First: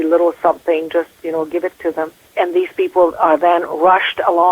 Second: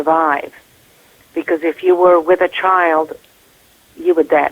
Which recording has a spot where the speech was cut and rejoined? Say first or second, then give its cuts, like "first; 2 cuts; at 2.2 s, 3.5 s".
first; 1 cut; at 2.2 s